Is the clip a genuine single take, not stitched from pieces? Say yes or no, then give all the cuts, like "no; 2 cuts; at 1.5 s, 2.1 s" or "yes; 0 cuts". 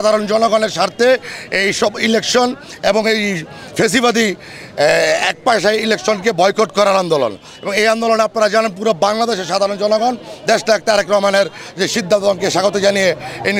yes; 0 cuts